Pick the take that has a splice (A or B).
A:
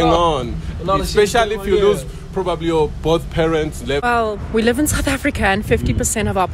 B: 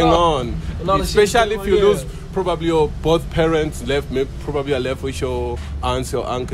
A